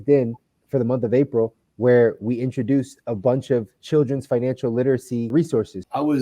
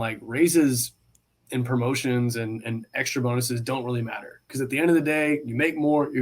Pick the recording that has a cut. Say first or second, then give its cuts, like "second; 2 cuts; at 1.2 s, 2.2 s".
first; 1 cut; at 5.3 s